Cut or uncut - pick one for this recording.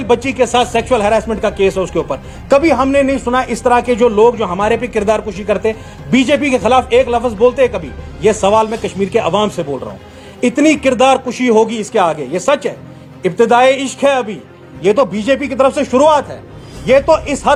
uncut